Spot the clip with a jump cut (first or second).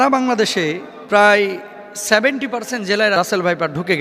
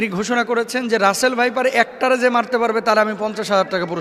first